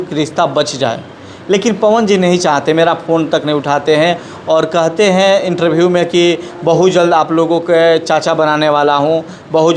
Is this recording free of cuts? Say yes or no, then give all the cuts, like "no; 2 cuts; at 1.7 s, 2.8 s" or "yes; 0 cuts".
yes; 0 cuts